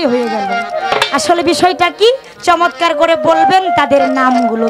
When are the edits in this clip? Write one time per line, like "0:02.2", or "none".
none